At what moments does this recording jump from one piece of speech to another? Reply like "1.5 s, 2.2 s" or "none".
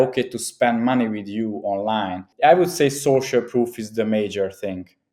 2.3 s